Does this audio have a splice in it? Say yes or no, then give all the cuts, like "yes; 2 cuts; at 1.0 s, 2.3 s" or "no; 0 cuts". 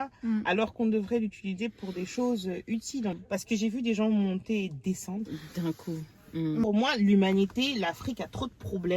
yes; 2 cuts; at 3.2 s, 6.6 s